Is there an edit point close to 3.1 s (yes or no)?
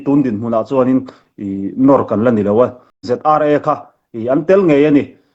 yes